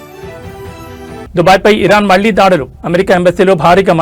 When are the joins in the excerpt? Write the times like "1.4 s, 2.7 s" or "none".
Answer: 1.3 s